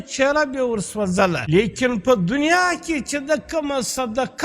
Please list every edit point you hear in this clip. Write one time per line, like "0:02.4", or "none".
0:01.4